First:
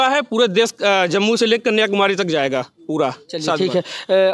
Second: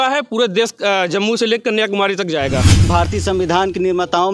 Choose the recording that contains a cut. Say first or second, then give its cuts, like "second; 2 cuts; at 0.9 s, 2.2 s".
second; 1 cut; at 2.9 s